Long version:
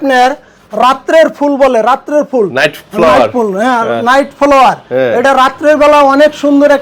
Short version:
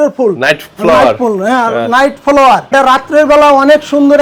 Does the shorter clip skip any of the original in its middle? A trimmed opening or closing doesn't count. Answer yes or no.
yes